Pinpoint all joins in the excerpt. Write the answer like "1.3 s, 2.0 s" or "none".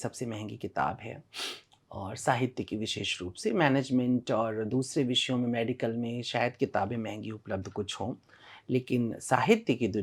none